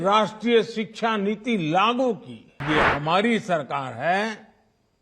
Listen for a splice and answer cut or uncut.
cut